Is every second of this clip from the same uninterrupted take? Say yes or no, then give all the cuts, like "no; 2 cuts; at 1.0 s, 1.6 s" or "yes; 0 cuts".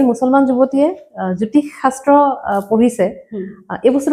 yes; 0 cuts